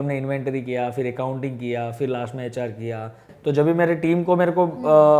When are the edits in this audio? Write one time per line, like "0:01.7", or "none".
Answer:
0:03.3